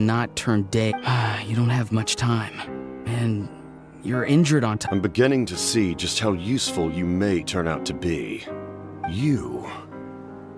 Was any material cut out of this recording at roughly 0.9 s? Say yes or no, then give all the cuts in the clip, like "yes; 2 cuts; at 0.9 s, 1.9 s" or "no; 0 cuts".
yes; 3 cuts; at 0.9 s, 4.8 s, 8.4 s